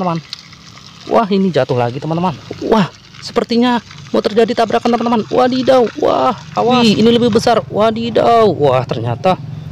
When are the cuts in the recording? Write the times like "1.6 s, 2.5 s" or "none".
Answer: 2.4 s, 6.7 s